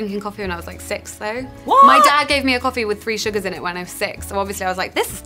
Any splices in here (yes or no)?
yes